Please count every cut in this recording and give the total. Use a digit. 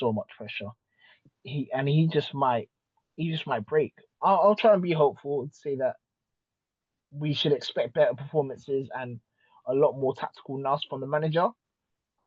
1